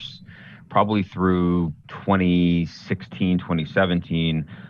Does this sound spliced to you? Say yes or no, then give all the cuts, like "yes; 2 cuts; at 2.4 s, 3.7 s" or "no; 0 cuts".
yes; 1 cut; at 1.9 s